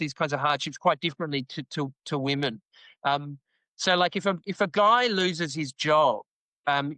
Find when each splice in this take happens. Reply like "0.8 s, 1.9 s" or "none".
none